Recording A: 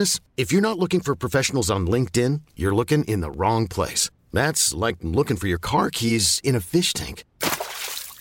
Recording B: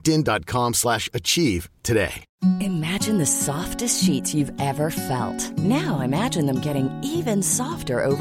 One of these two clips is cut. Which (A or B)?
B